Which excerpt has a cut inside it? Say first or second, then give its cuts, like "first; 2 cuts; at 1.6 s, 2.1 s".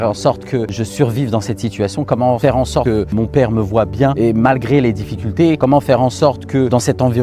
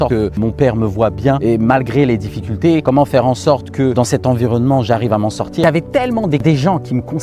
second; 1 cut; at 5.6 s